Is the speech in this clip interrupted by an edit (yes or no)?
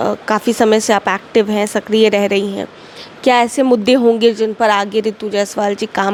no